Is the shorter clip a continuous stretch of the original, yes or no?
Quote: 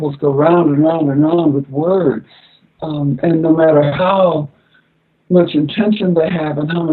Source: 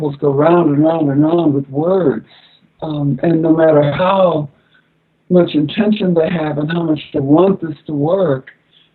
yes